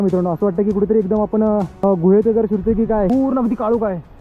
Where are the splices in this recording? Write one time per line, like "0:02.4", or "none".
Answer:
0:01.7
0:03.1